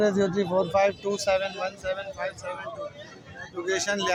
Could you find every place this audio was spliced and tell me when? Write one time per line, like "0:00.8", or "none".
none